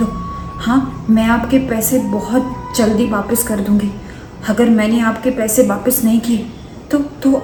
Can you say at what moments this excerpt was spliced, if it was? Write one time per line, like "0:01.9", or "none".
none